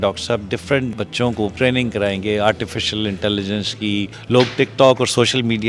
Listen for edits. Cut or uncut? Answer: cut